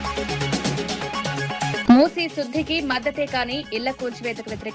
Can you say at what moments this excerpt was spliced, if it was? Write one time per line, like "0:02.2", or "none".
0:01.8